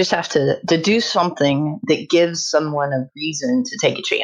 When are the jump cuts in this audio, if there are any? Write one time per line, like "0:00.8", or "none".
none